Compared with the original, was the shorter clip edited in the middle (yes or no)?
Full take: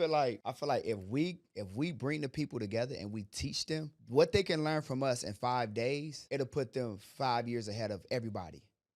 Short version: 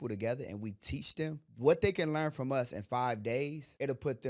no